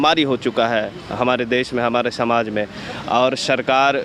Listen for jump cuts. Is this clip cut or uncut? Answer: uncut